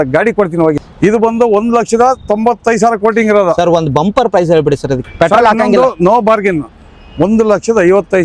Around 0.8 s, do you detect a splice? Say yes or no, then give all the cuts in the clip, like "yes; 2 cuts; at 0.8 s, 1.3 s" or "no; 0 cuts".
yes; 2 cuts; at 0.8 s, 5.0 s